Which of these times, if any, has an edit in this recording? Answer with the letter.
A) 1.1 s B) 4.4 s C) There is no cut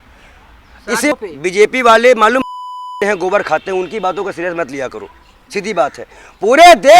A